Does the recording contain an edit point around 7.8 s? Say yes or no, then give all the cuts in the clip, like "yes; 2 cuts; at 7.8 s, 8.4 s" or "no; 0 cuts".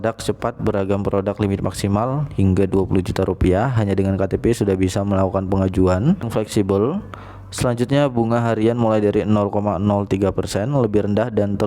no; 1 cut; at 6.3 s